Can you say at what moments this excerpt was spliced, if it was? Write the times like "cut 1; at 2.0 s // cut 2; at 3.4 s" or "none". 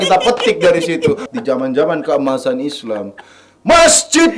cut 1; at 1.2 s